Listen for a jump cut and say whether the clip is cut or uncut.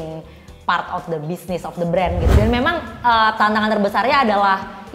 cut